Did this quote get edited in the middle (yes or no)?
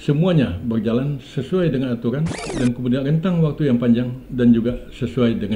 yes